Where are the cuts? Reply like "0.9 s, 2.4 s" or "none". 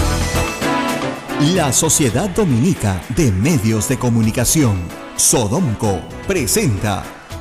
1.2 s

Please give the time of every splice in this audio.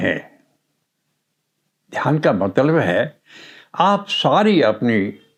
none

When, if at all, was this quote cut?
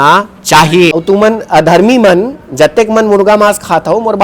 0.9 s

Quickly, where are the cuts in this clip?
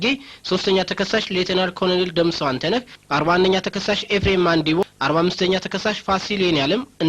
3.0 s, 4.8 s

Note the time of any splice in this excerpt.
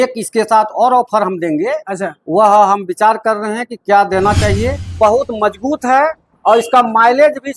5.0 s

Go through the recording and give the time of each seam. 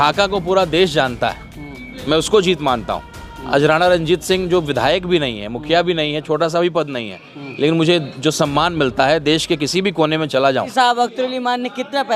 10.7 s

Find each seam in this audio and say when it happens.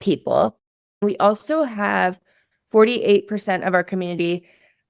1.0 s

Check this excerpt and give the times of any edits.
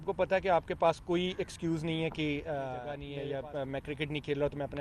3.0 s

